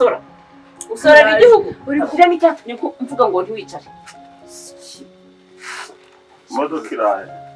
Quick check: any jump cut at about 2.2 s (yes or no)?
yes